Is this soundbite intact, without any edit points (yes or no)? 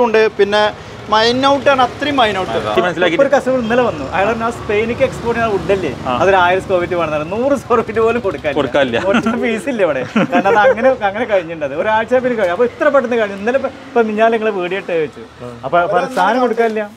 no